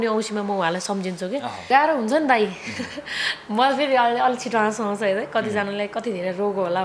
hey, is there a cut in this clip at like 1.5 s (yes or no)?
yes